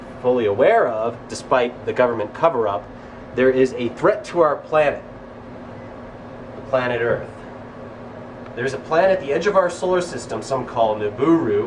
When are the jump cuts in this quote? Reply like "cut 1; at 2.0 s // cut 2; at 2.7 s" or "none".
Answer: cut 1; at 8.5 s